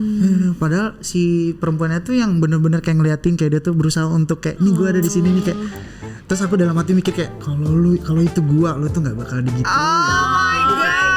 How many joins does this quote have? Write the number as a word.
zero